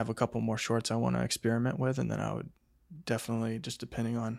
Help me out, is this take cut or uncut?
uncut